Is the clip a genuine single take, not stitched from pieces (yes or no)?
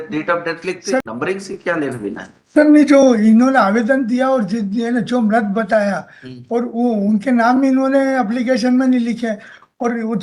no